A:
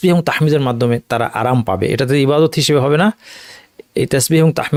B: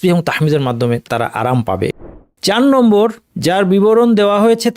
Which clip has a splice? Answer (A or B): B